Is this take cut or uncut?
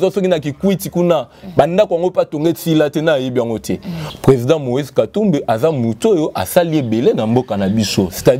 cut